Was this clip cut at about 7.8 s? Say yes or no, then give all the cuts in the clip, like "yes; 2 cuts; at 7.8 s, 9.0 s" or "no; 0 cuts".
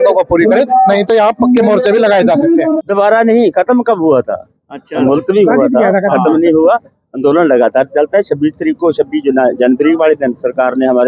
no; 1 cut; at 2.7 s